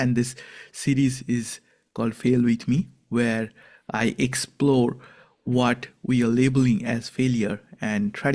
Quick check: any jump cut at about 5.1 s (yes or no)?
no